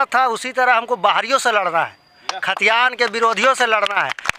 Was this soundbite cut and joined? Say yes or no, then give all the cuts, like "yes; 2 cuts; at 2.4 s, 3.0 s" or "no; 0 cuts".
no; 0 cuts